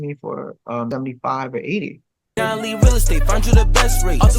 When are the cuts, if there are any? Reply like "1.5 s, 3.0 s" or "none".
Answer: 0.9 s, 2.3 s